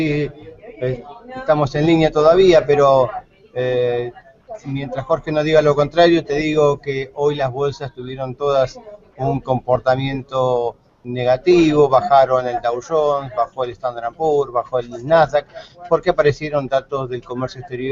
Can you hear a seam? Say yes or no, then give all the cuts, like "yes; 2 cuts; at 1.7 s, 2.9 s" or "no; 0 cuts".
no; 0 cuts